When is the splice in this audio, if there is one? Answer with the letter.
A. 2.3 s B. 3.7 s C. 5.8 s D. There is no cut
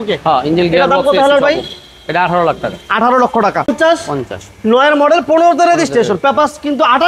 B